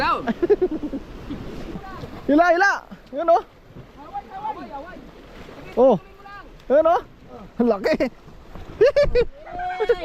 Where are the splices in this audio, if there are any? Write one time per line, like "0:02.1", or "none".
0:01.8